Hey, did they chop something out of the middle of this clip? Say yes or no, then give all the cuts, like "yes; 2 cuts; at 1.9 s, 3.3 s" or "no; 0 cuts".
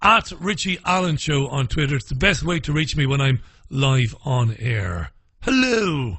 yes; 1 cut; at 0.9 s